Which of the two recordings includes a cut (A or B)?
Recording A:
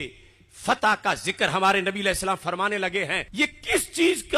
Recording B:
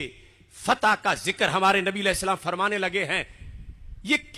A